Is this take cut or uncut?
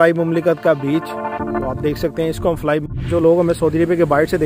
cut